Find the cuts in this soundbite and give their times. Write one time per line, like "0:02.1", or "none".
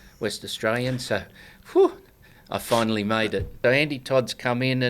0:03.5